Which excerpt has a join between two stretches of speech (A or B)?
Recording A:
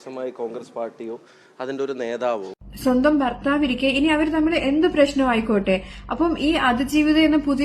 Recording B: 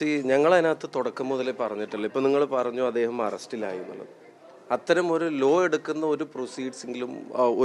A